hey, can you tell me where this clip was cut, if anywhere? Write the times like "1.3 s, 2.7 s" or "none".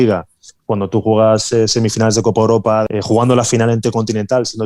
2.9 s